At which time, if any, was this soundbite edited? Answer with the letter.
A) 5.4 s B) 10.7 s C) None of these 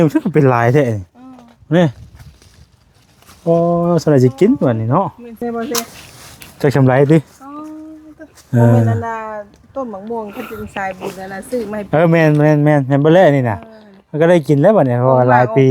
A